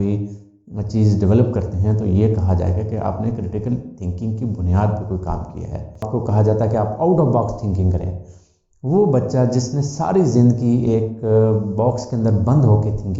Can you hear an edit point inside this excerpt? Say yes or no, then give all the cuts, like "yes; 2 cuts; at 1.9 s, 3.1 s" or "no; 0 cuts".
yes; 1 cut; at 6.1 s